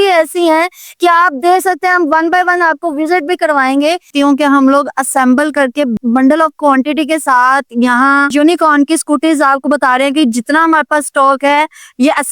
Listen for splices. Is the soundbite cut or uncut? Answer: cut